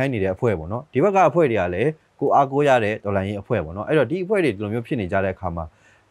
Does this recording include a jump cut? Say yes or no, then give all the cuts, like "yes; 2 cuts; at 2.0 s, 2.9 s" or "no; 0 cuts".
no; 0 cuts